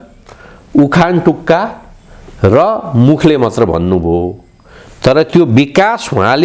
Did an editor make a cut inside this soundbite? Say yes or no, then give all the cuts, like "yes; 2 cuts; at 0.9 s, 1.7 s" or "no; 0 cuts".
no; 0 cuts